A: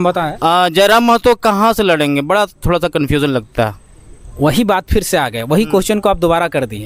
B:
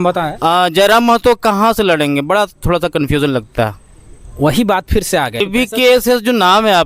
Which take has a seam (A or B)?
B